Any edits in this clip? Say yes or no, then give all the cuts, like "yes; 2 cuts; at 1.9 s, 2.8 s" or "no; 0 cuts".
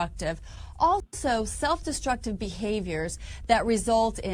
no; 0 cuts